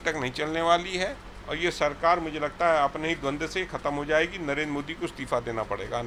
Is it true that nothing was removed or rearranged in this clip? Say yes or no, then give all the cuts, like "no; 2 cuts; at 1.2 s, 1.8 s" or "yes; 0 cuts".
yes; 0 cuts